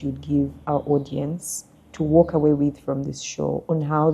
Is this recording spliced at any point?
no; 0 cuts

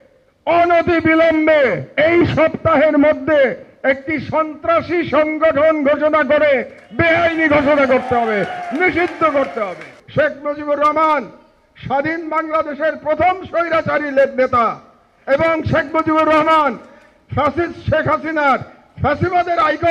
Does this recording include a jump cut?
yes; 1 cut; at 10.0 s

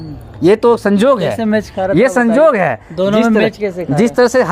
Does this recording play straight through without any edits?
yes; 0 cuts

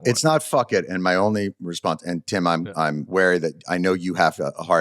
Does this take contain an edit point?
yes; 1 cut; at 3.0 s

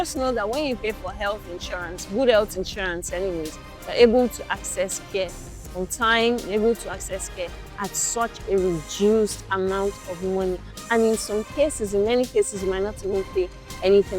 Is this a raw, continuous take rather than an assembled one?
yes; 0 cuts

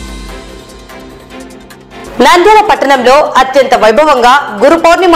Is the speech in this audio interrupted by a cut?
no; 0 cuts

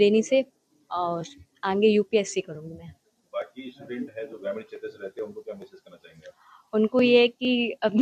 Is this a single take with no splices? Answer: yes; 0 cuts

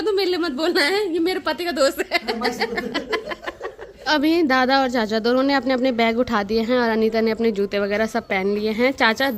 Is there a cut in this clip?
no; 0 cuts

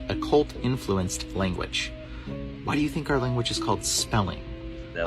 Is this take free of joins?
no; 1 cut; at 2.2 s

